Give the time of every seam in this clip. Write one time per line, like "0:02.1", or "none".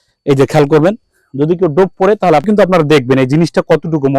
0:02.5